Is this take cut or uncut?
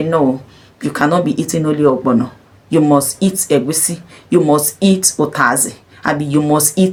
uncut